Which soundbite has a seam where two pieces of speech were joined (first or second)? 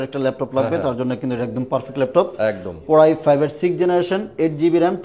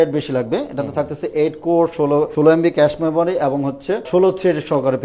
second